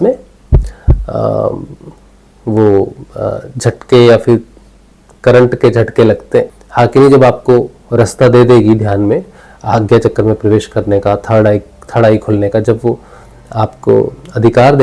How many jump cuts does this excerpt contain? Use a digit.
1